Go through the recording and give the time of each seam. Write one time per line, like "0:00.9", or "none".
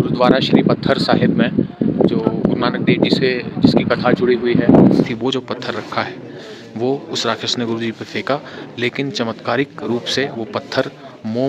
0:05.0